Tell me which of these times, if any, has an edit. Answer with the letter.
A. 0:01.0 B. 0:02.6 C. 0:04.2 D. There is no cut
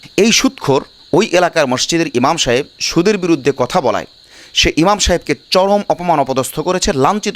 A